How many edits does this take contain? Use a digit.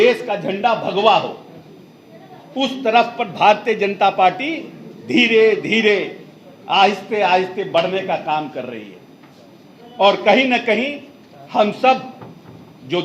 0